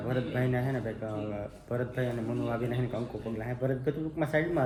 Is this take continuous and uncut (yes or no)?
yes